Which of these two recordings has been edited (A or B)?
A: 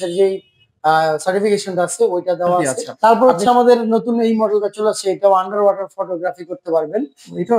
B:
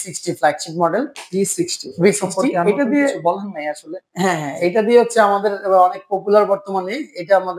A